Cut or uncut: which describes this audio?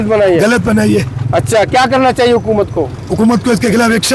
uncut